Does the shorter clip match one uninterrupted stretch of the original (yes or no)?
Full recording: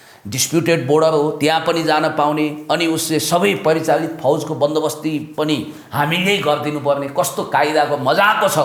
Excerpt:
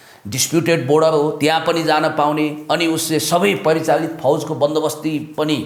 yes